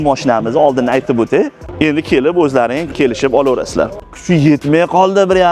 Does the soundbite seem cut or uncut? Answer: cut